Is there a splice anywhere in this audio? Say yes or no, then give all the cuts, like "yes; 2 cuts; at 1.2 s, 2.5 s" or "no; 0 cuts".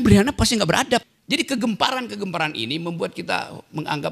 yes; 1 cut; at 1.1 s